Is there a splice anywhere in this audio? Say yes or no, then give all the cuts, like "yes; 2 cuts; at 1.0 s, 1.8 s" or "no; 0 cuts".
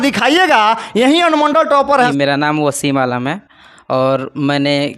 yes; 1 cut; at 2.1 s